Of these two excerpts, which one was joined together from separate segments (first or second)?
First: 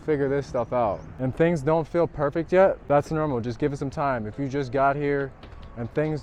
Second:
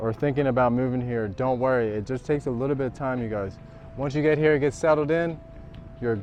first